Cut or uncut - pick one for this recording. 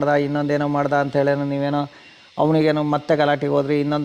uncut